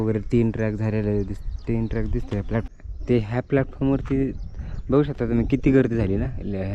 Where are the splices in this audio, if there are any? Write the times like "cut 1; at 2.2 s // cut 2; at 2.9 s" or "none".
cut 1; at 2.7 s